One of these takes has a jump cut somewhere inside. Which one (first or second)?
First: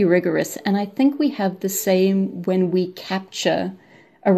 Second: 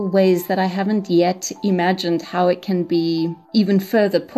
second